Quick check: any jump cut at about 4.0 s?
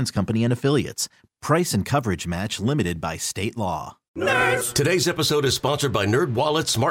yes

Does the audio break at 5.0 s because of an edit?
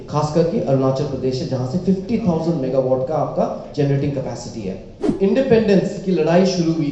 yes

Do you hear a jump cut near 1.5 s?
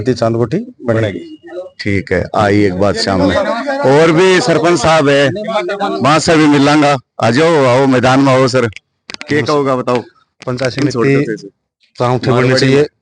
no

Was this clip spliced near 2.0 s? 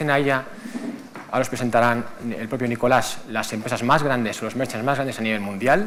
no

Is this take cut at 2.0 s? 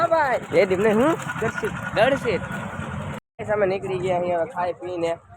no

